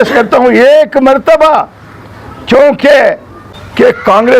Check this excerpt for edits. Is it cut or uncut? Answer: uncut